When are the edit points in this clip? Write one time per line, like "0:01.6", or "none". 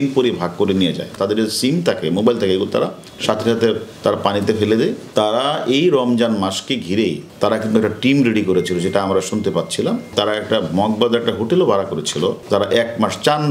0:01.1
0:05.0
0:07.3
0:10.1
0:12.4